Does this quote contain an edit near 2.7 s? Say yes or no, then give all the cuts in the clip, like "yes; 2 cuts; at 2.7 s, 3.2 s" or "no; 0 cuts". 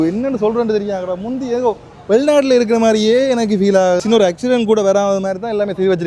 no; 1 cut; at 4.0 s